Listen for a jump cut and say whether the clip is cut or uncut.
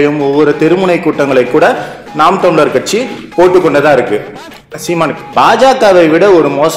cut